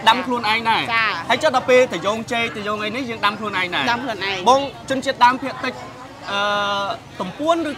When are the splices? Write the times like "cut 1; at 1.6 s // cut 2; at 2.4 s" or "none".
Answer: none